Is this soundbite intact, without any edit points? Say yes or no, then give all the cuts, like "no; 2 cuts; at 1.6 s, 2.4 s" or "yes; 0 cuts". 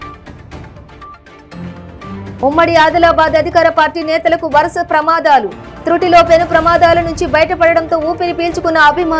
yes; 0 cuts